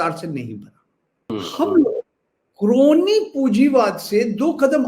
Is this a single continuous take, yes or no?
no